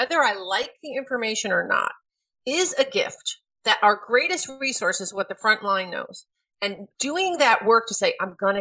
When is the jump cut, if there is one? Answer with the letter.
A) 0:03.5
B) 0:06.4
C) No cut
A